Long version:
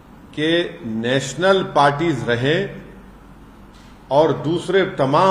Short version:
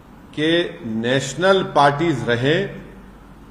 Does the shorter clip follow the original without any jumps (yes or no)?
yes